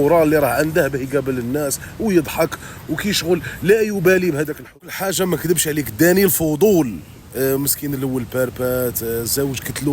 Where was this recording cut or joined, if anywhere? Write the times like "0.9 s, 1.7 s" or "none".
5.0 s